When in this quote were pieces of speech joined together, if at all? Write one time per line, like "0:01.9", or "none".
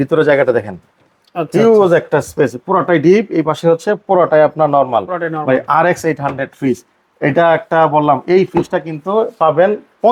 none